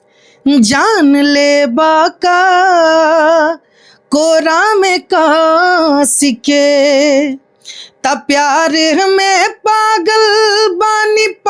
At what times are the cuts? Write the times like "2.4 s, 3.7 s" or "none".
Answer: none

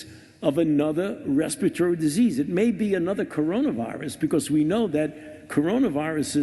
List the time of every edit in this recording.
none

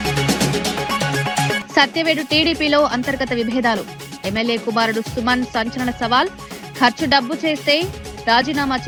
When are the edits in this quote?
none

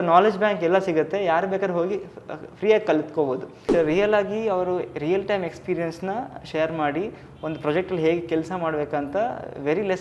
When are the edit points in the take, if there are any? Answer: 3.7 s

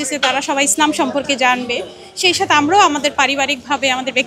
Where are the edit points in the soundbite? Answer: none

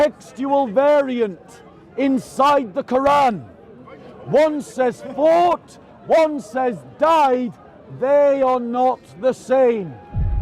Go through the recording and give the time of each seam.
none

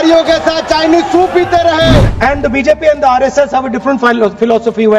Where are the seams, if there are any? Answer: 2.1 s

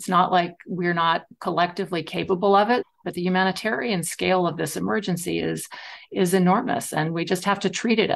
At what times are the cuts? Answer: 2.9 s

